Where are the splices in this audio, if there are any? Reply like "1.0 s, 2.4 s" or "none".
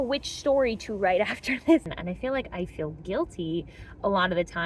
1.9 s